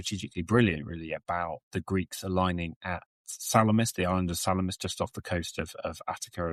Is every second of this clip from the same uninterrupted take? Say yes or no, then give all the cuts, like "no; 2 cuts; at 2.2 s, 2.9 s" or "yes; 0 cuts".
yes; 0 cuts